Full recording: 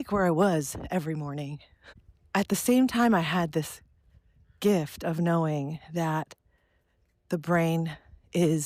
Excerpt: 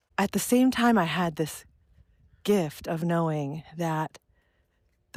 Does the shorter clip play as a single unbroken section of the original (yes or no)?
yes